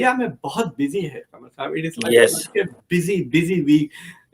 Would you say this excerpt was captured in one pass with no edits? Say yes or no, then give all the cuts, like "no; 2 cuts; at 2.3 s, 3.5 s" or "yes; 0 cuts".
yes; 0 cuts